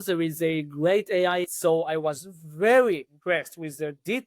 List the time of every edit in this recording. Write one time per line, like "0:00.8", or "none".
0:01.4
0:03.1